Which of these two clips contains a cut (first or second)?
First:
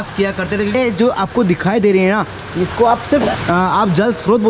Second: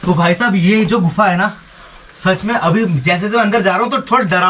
first